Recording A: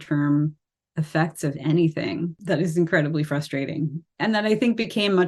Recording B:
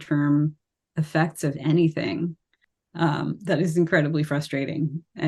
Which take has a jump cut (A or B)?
A